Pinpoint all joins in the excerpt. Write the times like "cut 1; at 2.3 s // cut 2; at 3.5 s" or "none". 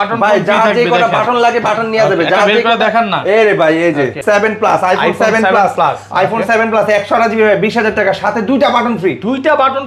cut 1; at 4.2 s